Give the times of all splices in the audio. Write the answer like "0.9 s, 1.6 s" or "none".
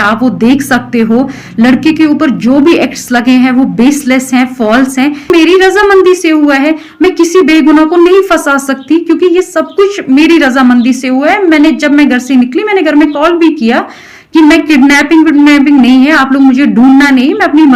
5.3 s